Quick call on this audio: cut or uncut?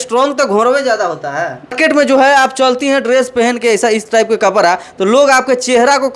cut